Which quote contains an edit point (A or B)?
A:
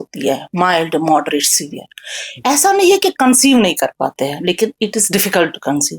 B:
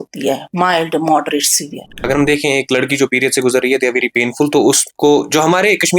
B